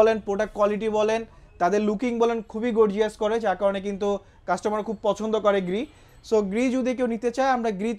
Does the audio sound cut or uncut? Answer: uncut